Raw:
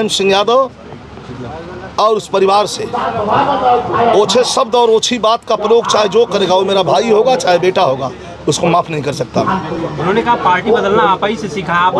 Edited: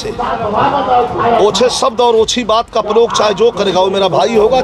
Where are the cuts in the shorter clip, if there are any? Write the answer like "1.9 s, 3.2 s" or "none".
none

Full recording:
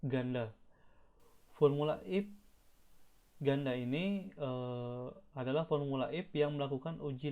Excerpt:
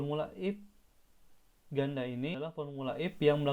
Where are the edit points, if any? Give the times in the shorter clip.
2.6 s

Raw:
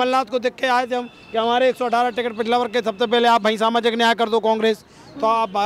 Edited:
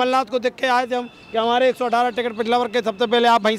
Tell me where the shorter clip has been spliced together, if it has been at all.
none

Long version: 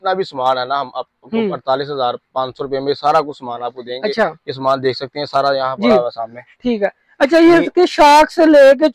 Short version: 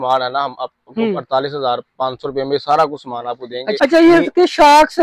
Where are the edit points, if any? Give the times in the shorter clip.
3.8 s

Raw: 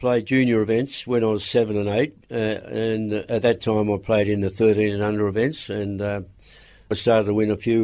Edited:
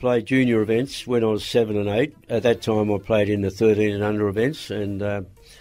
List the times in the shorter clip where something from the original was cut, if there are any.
2.2 s

